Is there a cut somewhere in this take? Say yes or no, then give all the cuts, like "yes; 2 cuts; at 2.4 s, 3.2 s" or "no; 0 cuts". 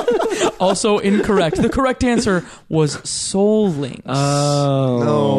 no; 0 cuts